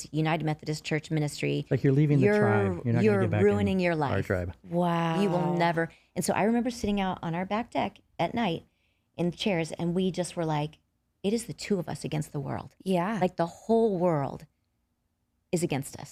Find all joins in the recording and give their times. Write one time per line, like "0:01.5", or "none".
none